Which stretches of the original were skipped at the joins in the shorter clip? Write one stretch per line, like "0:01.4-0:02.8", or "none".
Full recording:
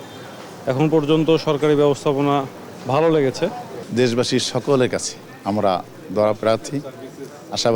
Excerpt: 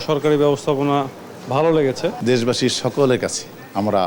0:03.6-0:03.9